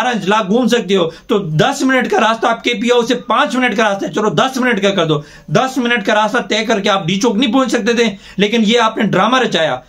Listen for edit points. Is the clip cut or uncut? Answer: uncut